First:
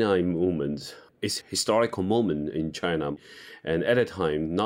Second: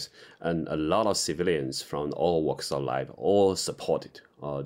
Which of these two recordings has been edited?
first; 2 cuts; at 1.3 s, 3.1 s

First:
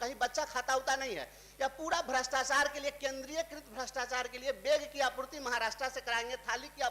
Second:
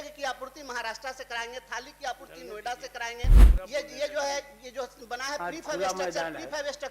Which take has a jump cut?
second; 1 cut; at 3.4 s

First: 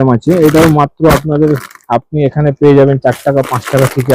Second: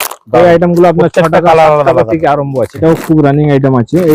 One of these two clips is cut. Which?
second; 1 cut; at 2.8 s

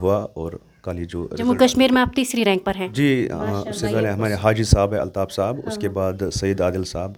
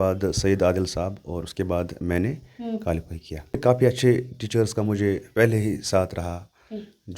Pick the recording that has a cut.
second; 1 cut; at 3.6 s

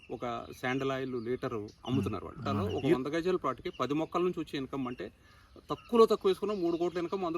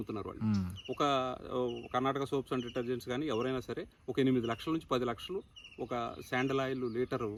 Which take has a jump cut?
first; 1 cut; at 3.0 s

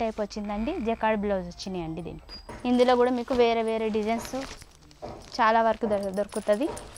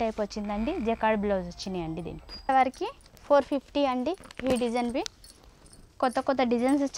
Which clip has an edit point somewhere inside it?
first; 1 cut; at 2.2 s

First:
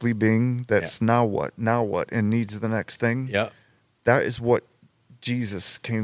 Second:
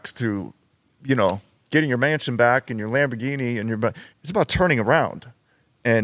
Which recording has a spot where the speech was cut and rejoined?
second; 1 cut; at 4.1 s

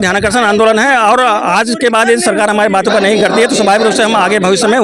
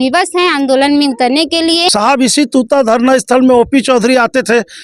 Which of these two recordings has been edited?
second; 1 cut; at 1.9 s

